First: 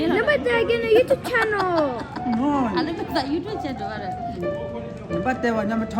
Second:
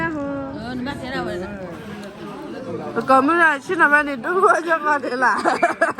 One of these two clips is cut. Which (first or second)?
second